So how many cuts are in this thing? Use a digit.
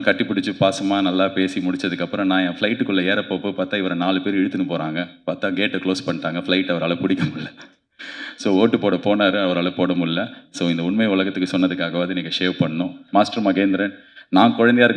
1